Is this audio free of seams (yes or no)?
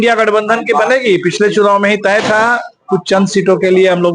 yes